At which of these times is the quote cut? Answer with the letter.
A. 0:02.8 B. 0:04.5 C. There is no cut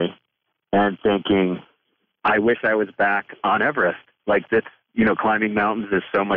C